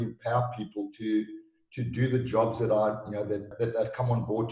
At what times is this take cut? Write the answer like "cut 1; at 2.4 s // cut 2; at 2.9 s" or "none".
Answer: cut 1; at 3.5 s